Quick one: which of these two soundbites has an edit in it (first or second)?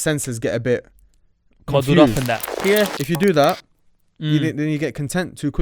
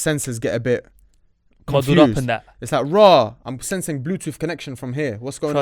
first